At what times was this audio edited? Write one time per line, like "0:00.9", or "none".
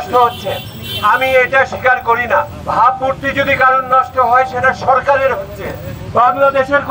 0:02.6